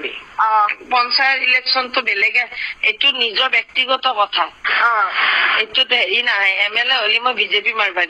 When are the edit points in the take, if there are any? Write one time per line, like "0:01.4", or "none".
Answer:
none